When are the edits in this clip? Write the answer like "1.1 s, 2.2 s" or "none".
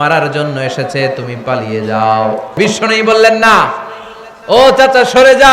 2.6 s